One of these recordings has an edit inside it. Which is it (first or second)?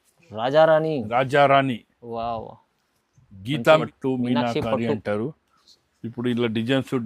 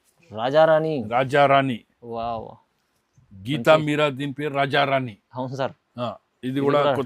first